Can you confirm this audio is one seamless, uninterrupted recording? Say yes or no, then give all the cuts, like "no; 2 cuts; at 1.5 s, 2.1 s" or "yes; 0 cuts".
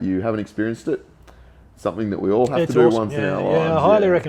yes; 0 cuts